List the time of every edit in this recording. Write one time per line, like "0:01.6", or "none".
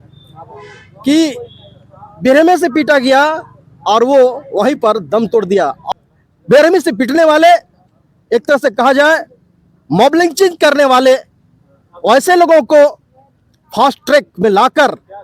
0:05.8